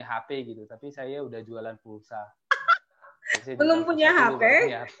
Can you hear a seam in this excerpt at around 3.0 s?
no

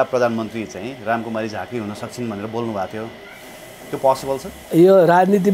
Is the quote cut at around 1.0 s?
no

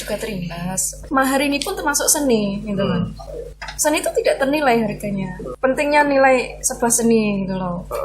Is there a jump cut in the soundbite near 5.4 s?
yes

